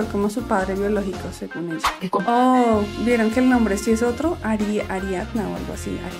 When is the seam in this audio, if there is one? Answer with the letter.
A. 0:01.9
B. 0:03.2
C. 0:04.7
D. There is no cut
A